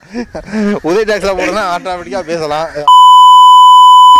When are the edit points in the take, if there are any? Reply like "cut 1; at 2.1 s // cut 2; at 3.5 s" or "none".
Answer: cut 1; at 2.8 s